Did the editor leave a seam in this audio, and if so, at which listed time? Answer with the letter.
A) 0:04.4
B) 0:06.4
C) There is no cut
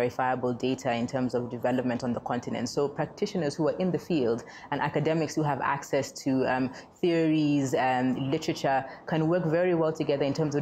C